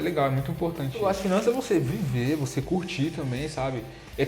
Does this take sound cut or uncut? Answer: cut